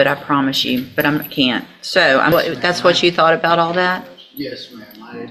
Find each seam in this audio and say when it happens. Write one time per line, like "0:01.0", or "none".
0:02.3